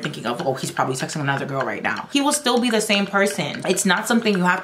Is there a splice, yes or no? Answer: yes